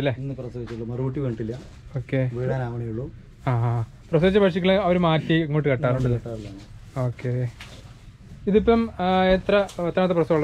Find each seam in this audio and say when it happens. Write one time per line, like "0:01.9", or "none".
none

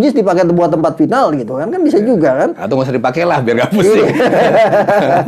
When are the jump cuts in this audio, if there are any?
none

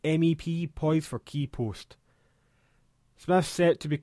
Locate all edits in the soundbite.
none

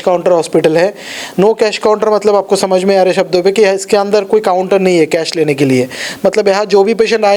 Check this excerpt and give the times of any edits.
none

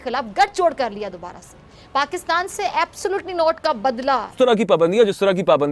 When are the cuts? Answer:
0:04.3

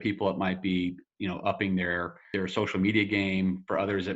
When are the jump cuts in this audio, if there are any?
0:02.2

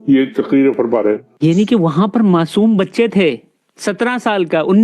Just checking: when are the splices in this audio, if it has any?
0:01.3

